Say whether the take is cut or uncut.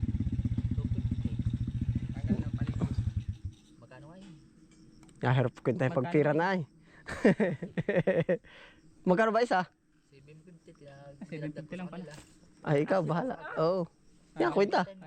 uncut